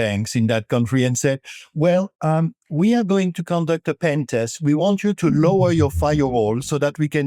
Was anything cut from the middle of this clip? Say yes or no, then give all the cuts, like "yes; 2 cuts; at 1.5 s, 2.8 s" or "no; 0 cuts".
no; 0 cuts